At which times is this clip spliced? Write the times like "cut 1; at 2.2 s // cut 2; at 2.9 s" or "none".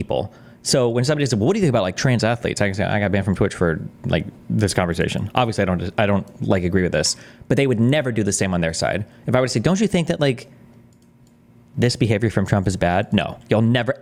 none